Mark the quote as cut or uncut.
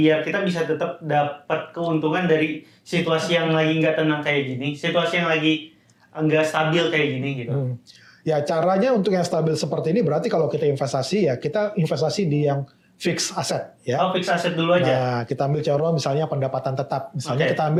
uncut